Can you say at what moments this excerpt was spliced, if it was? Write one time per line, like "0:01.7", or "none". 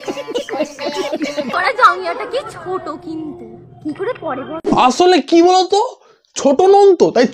0:01.5
0:04.5